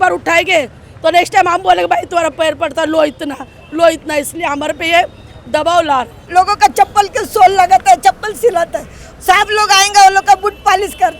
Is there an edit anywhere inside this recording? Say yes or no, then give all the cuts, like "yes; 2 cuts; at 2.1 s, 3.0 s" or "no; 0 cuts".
yes; 1 cut; at 6.2 s